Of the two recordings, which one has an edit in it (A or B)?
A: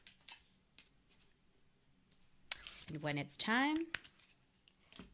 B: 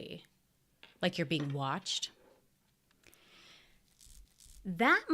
B